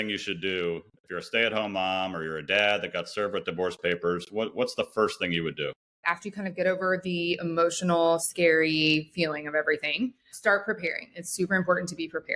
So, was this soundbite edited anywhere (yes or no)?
yes